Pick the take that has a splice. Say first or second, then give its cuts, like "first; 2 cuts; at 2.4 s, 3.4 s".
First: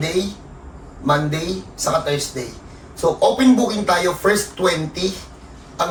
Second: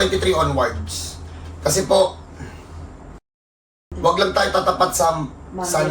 second; 1 cut; at 3.4 s